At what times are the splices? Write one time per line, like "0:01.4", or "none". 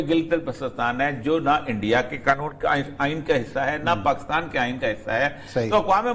none